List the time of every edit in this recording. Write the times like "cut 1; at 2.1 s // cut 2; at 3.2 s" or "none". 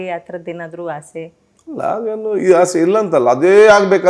none